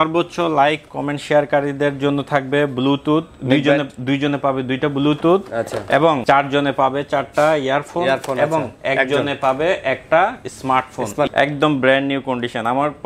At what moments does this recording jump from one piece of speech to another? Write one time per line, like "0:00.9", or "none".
0:06.2
0:11.3